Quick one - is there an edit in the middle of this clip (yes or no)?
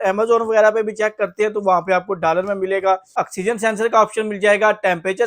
yes